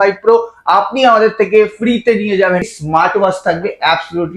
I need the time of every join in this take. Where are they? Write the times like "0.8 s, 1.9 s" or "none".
2.7 s